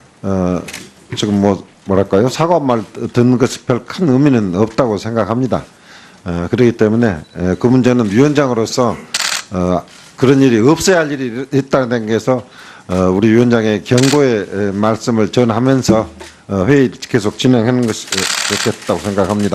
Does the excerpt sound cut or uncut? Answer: cut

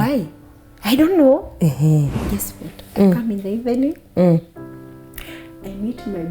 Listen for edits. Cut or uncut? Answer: cut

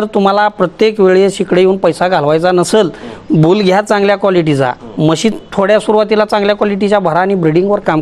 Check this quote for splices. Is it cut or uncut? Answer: uncut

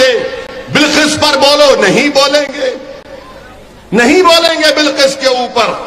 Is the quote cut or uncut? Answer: uncut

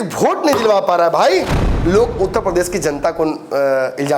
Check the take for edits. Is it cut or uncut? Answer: cut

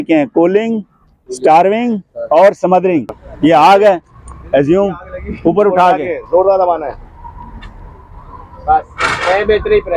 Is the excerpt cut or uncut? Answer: cut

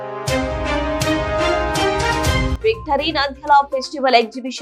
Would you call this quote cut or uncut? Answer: cut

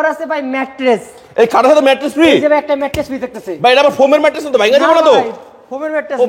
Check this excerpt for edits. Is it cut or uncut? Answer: uncut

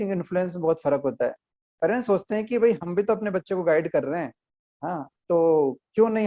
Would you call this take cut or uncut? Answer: uncut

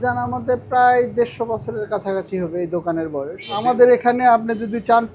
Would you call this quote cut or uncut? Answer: cut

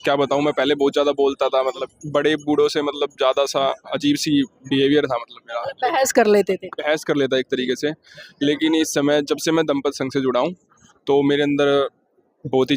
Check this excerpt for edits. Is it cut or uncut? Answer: cut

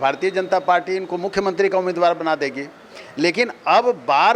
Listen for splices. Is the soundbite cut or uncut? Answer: uncut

